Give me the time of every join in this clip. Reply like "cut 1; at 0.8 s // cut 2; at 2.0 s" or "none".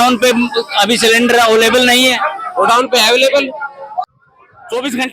cut 1; at 4.0 s